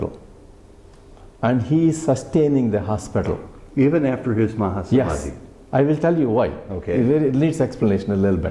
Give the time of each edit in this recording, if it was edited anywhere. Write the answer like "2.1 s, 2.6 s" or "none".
none